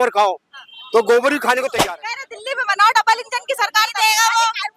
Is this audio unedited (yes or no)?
no